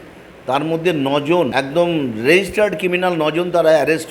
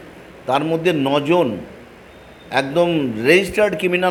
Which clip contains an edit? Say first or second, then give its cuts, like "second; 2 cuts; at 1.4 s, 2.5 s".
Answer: first; 1 cut; at 1.5 s